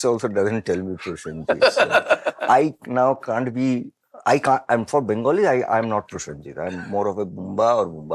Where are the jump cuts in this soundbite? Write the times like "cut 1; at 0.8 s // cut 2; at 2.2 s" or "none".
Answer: none